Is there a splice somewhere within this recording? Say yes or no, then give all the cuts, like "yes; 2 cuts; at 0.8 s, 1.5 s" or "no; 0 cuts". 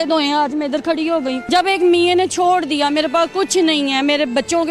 yes; 1 cut; at 1.4 s